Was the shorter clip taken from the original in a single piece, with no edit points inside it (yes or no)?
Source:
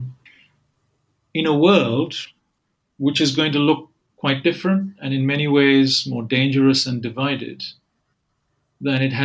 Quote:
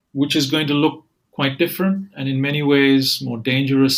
yes